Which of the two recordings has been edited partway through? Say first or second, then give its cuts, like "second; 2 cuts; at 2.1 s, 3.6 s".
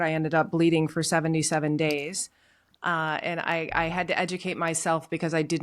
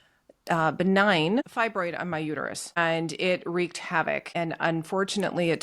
second; 3 cuts; at 1.5 s, 2.8 s, 4.3 s